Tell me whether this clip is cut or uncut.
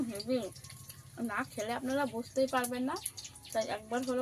uncut